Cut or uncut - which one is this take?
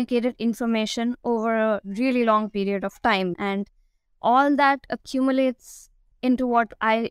uncut